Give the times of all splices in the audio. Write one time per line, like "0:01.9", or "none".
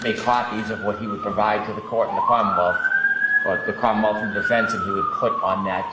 none